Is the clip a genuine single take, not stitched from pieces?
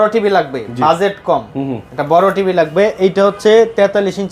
yes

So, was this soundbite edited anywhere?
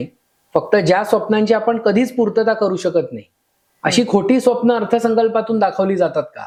no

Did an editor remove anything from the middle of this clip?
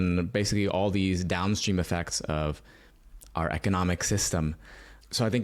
no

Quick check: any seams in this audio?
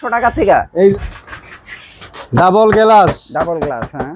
yes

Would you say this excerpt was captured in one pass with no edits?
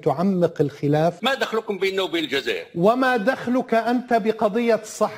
no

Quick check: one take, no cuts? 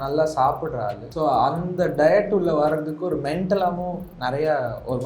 no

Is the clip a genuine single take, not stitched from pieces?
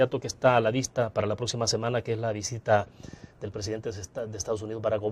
no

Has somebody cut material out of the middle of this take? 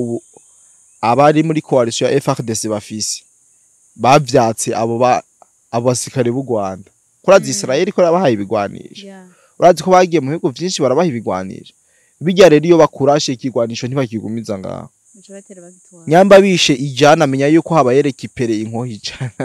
no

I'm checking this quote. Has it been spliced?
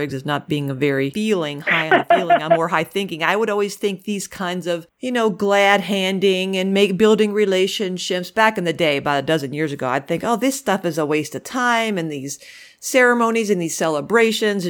yes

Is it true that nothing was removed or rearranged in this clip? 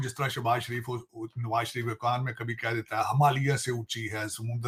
yes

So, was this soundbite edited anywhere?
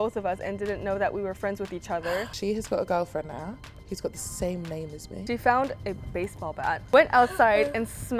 yes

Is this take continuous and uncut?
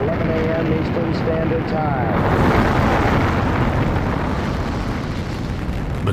yes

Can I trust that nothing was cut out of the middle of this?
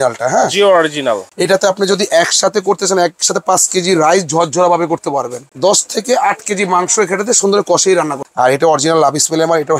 no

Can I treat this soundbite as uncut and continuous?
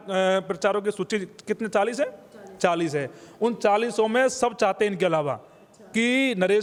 yes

